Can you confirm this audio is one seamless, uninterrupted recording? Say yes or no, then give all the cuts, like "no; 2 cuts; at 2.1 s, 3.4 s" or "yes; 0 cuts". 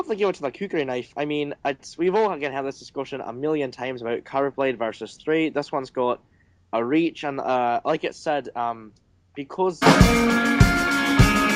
yes; 0 cuts